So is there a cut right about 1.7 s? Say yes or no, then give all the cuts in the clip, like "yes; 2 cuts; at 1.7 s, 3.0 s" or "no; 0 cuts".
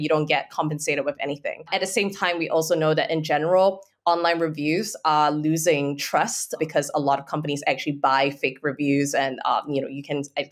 yes; 2 cuts; at 1.7 s, 6.6 s